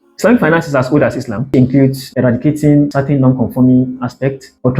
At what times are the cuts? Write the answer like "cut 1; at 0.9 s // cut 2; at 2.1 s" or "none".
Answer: cut 1; at 1.5 s